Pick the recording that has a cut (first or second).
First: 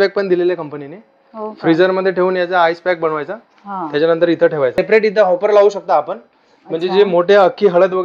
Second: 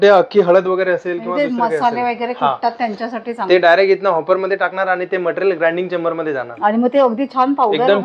first